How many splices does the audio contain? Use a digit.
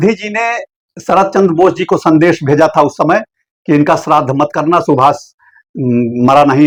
0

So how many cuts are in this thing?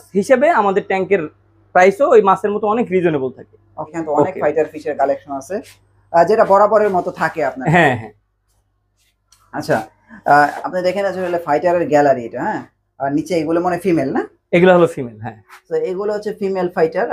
0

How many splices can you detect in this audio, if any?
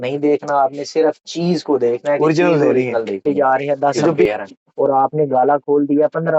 1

